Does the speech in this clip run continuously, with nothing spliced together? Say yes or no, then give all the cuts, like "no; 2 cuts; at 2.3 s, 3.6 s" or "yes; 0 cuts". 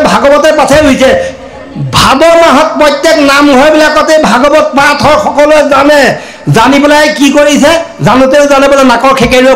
yes; 0 cuts